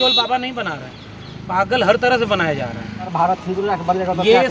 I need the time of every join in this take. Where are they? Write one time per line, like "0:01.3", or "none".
0:03.1